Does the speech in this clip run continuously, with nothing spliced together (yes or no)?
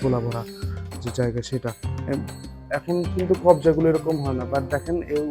no